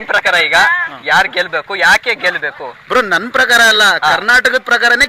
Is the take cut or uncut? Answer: uncut